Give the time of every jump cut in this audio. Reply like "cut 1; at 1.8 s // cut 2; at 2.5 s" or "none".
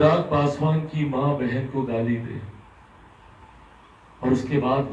none